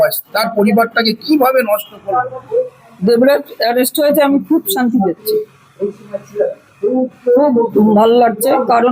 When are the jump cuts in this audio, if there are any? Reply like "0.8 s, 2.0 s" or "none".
2.4 s